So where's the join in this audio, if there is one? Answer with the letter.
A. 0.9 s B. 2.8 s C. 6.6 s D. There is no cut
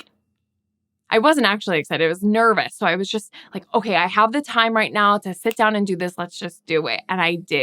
A